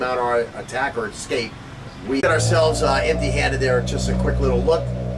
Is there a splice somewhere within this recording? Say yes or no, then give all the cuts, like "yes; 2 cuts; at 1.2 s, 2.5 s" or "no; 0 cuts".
no; 0 cuts